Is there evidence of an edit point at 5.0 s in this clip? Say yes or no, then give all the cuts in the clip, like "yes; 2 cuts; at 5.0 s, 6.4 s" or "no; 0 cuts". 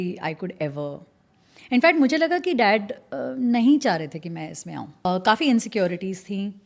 yes; 1 cut; at 5.0 s